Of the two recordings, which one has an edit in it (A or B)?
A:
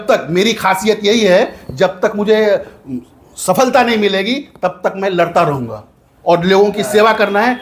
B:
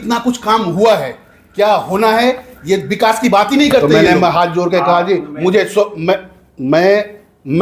B